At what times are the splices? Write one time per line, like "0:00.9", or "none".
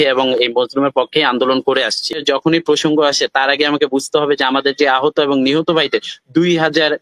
0:02.2

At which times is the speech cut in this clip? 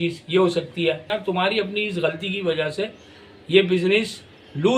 0:01.1

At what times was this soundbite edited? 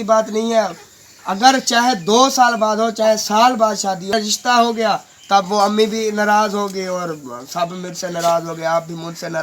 0:04.1

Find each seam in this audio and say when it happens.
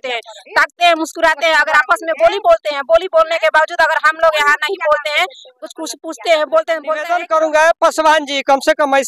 0:07.0

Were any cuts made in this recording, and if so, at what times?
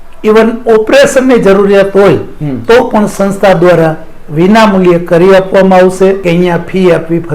0:06.2

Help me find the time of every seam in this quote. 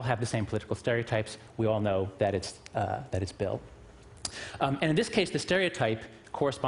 0:05.2

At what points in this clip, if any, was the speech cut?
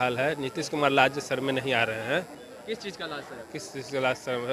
none

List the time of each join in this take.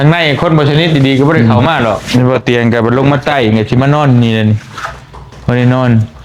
0:02.0

